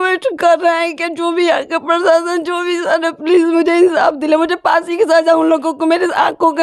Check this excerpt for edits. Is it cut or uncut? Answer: uncut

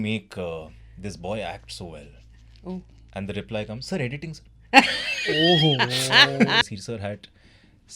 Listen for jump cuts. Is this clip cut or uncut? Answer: cut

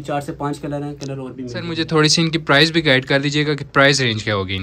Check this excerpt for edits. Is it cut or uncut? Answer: cut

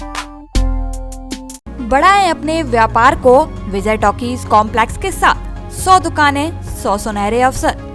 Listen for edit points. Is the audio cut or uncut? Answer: uncut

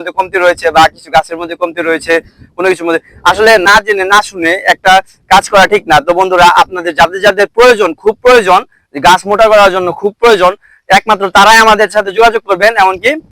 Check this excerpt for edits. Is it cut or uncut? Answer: cut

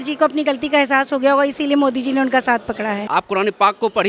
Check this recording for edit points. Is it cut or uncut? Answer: cut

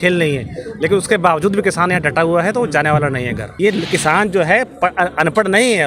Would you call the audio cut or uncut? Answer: cut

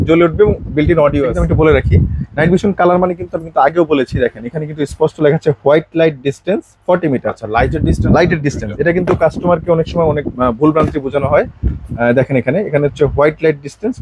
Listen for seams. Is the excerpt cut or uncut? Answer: cut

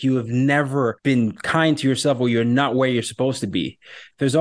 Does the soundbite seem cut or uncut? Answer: cut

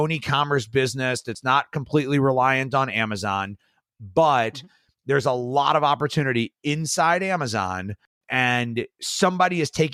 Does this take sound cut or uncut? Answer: uncut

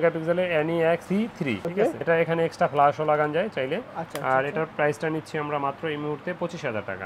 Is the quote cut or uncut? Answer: uncut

